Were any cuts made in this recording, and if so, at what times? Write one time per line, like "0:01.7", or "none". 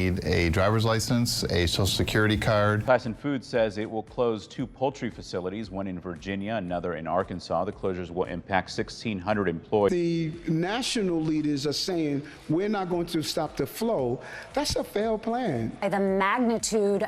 0:02.8
0:09.9
0:15.7